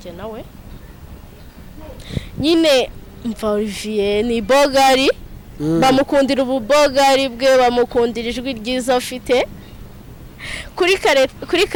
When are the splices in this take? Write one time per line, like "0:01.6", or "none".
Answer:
none